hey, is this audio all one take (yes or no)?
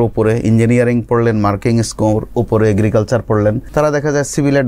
no